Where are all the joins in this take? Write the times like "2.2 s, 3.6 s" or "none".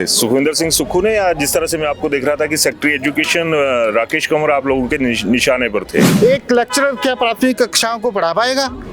6.1 s